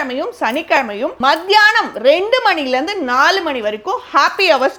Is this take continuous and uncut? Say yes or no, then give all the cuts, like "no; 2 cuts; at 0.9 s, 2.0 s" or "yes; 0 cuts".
yes; 0 cuts